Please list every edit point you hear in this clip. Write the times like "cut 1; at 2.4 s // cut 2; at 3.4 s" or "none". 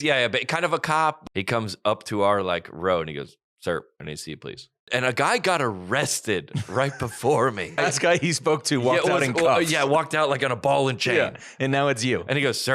cut 1; at 1.2 s // cut 2; at 4.8 s // cut 3; at 7.8 s